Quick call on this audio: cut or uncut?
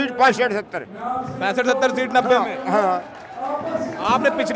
uncut